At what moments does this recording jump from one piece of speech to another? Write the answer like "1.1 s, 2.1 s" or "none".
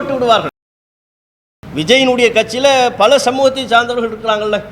1.0 s